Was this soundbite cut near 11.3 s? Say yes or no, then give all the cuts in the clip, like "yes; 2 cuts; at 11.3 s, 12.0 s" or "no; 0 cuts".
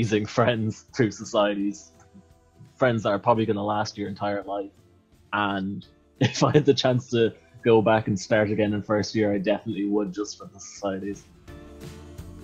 yes; 1 cut; at 11.3 s